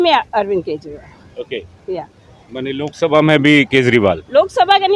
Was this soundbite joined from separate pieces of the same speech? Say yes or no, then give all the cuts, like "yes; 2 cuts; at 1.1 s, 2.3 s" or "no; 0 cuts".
no; 0 cuts